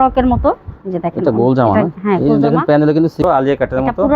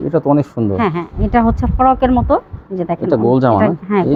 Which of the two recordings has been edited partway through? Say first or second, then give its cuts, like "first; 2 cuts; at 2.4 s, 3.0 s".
first; 1 cut; at 3.2 s